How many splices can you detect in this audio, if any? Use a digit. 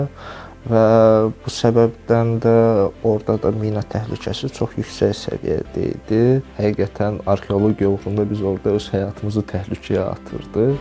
1